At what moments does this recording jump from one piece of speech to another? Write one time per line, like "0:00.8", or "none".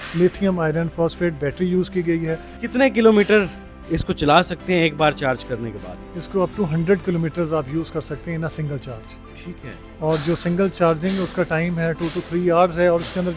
0:02.5